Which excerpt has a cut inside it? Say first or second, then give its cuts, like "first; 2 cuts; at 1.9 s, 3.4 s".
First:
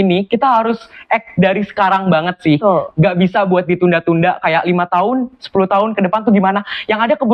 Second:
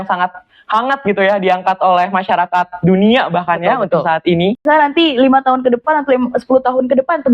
second; 1 cut; at 4.6 s